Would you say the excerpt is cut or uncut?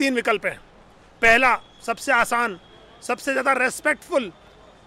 uncut